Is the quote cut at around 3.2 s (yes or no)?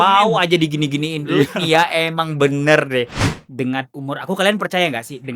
yes